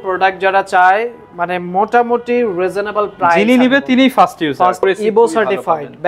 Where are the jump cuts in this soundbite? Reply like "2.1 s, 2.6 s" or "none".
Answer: 4.8 s